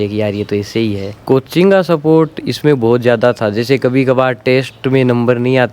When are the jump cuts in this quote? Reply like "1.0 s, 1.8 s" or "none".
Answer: 1.1 s